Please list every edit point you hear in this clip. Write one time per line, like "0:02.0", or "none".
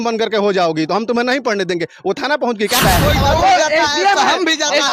0:02.8